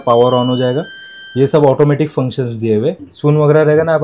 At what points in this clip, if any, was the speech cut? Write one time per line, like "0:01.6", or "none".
0:03.1

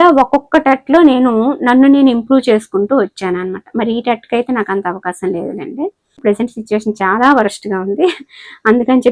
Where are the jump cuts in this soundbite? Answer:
0:06.2

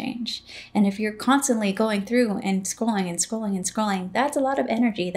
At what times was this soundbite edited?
none

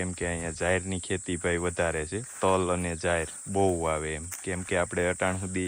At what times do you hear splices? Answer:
none

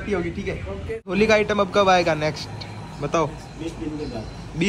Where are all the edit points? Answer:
0:01.1

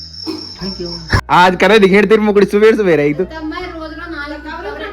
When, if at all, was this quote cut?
0:01.2

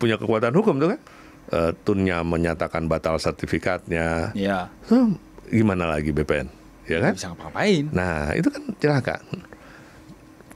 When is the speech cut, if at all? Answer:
0:01.1

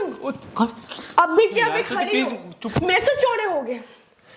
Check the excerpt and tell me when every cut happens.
0:02.8

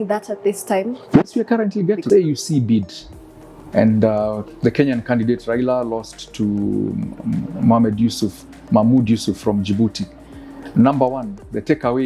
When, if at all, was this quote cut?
0:02.0

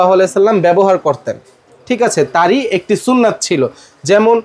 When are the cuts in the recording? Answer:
none

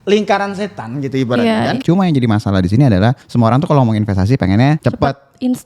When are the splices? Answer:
0:01.8
0:03.2
0:04.8

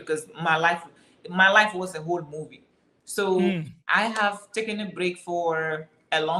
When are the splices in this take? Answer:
none

